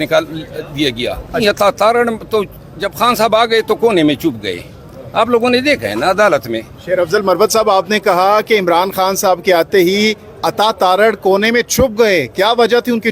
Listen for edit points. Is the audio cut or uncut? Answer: cut